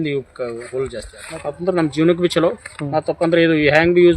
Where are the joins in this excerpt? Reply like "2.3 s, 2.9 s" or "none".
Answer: 1.1 s

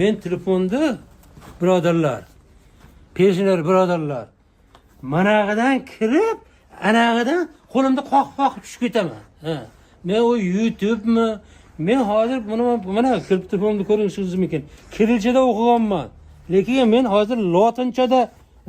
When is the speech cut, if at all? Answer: none

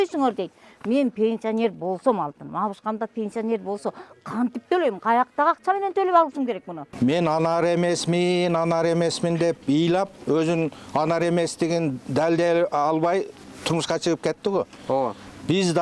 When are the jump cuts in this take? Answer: 6.8 s

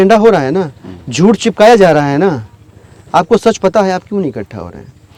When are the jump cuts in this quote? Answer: none

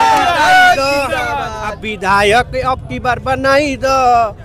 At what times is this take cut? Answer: none

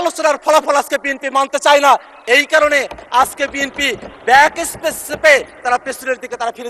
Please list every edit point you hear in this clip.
none

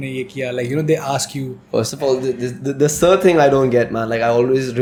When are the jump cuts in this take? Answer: none

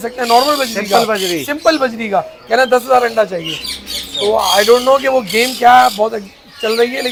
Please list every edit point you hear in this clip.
none

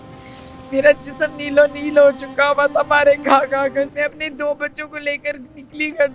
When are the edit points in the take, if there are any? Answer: 3.9 s

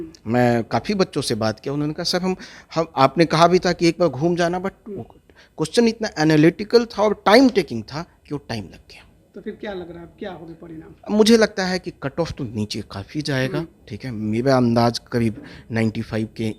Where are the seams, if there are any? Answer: none

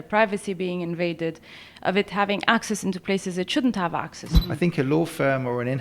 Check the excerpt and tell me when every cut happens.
4.3 s

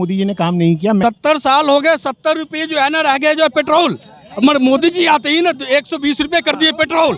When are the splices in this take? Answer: 1.0 s

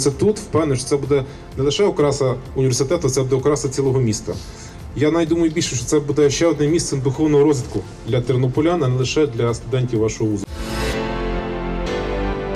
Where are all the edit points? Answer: 10.5 s

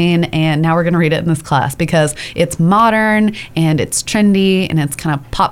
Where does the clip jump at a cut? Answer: none

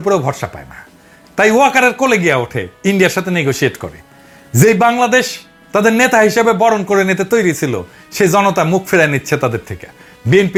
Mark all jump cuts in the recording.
none

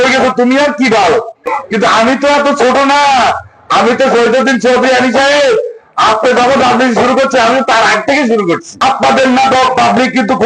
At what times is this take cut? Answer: 1.3 s, 8.7 s

